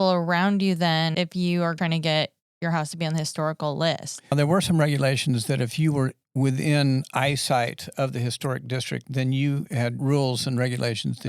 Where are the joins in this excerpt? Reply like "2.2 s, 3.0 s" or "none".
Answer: 1.7 s, 4.3 s, 10.0 s